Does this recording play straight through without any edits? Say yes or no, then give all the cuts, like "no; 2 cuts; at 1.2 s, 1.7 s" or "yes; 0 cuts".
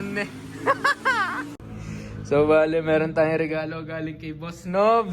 no; 1 cut; at 1.7 s